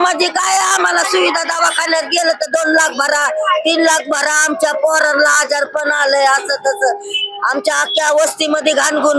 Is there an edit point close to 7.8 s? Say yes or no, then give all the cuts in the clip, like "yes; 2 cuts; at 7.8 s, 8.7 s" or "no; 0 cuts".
no; 0 cuts